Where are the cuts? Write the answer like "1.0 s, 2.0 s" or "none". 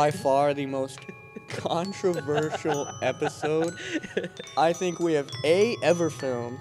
none